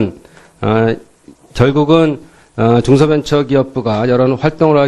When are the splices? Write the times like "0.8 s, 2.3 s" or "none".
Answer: 3.5 s